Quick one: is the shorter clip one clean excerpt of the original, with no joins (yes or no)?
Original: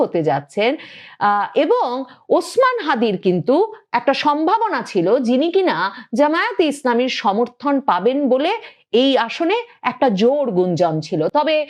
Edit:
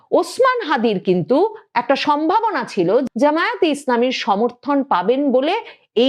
no